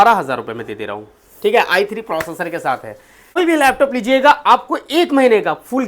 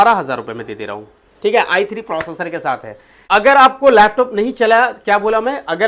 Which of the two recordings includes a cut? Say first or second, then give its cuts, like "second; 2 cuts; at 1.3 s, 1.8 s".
first; 1 cut; at 3.3 s